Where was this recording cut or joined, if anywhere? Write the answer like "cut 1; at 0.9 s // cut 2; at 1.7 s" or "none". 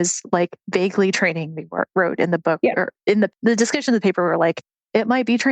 cut 1; at 3.4 s